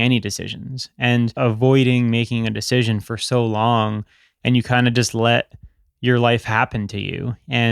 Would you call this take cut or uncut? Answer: cut